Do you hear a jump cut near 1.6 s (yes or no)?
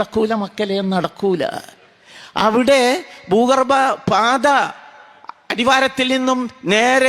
no